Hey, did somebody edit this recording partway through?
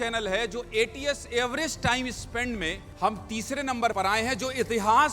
yes; 2 cuts; at 2.8 s, 3.9 s

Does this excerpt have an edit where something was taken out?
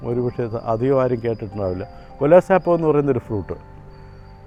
no; 0 cuts

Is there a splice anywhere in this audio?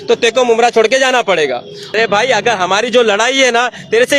yes; 1 cut; at 1.9 s

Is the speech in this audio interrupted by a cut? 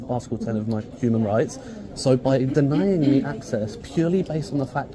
no; 0 cuts

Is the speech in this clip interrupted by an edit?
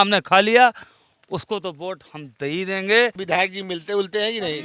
yes; 1 cut; at 3.2 s

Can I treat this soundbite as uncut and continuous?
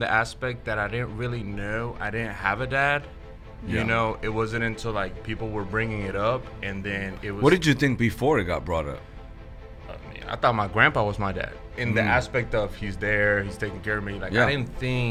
yes; 0 cuts

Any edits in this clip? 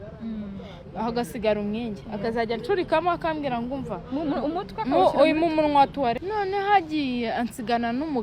yes; 1 cut; at 6.2 s

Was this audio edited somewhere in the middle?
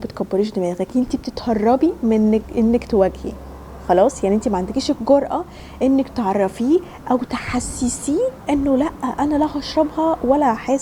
no; 0 cuts

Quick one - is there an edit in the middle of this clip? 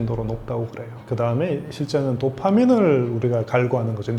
yes; 1 cut; at 0.9 s

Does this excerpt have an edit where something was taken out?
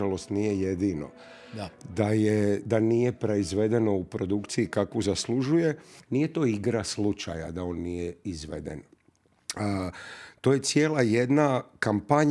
yes; 1 cut; at 5.9 s

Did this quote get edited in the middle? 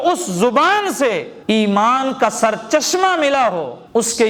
no; 0 cuts

